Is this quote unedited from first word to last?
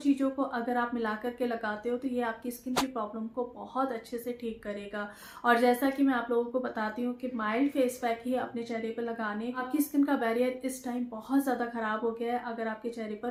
yes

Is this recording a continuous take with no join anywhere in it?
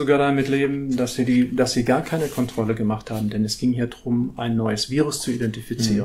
yes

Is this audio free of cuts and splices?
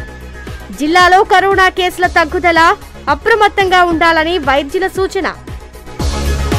yes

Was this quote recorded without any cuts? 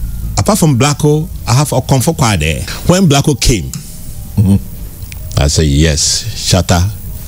no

